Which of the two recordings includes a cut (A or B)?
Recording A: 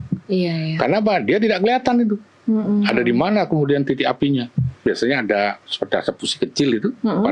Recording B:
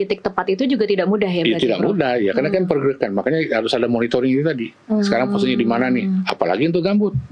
A